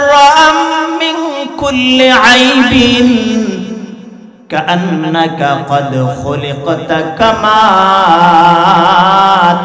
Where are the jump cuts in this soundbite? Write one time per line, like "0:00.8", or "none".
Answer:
none